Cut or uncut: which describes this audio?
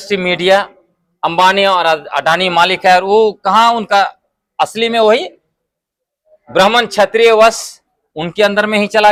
uncut